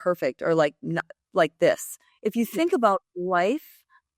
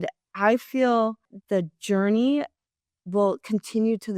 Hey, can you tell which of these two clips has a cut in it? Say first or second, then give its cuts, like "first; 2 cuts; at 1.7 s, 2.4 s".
second; 1 cut; at 1.3 s